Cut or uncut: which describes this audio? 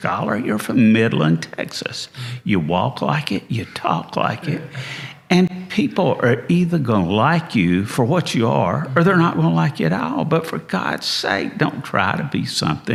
uncut